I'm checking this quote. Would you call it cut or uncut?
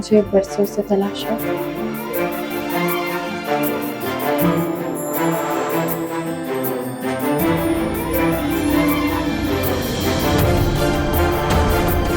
cut